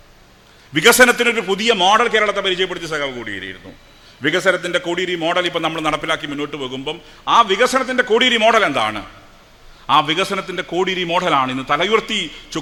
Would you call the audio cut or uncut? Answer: uncut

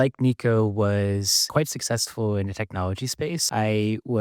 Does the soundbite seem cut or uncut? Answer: cut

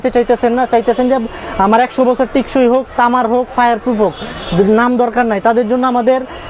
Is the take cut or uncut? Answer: uncut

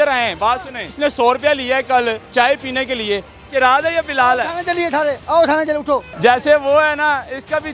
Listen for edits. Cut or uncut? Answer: cut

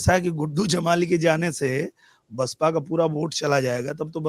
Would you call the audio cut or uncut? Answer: uncut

